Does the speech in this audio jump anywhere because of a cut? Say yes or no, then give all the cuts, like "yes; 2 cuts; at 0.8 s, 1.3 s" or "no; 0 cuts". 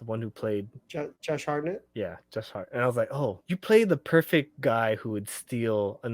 yes; 3 cuts; at 1.1 s, 1.9 s, 3.4 s